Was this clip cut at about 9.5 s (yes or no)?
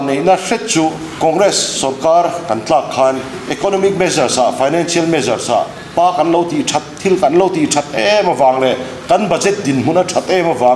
no